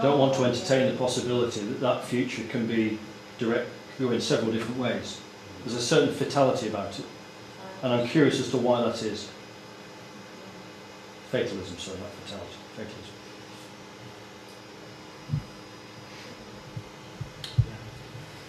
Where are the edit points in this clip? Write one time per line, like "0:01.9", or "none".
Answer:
none